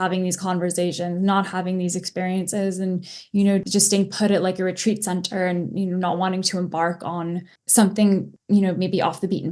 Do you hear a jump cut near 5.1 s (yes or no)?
no